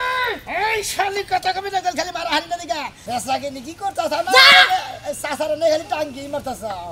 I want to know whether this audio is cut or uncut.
cut